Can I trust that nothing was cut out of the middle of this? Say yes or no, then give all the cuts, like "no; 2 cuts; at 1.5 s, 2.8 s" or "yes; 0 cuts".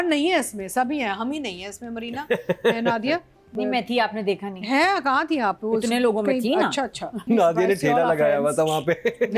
no; 2 cuts; at 3.5 s, 7.2 s